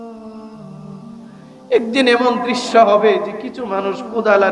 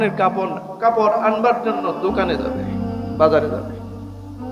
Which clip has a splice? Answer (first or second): second